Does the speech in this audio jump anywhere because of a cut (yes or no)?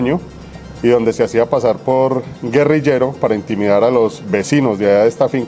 no